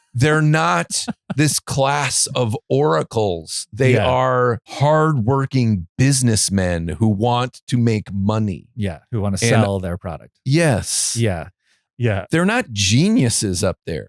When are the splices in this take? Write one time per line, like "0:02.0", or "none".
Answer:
0:04.7
0:11.9